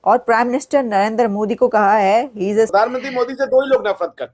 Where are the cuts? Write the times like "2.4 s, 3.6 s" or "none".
2.7 s